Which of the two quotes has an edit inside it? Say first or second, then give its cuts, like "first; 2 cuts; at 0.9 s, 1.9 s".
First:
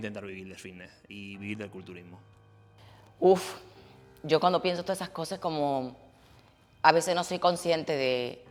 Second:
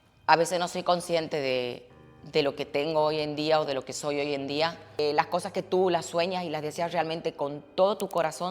second; 1 cut; at 5.0 s